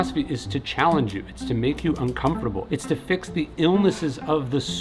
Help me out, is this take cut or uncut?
uncut